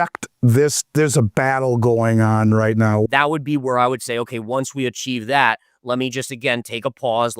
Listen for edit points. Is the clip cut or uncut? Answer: cut